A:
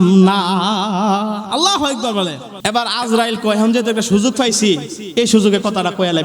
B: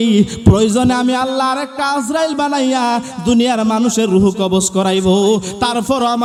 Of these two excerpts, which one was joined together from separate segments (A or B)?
A